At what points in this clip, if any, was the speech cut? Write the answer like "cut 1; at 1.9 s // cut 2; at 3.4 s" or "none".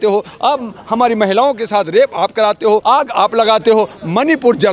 cut 1; at 2.8 s